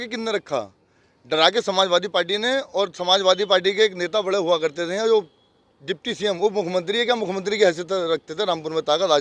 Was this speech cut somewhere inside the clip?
no; 0 cuts

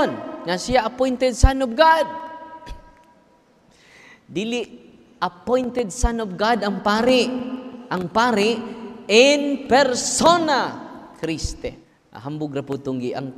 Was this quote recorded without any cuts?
no; 1 cut; at 11.9 s

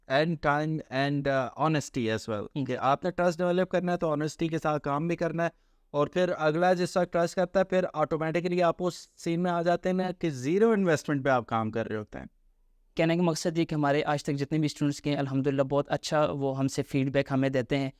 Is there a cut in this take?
yes; 1 cut; at 12.9 s

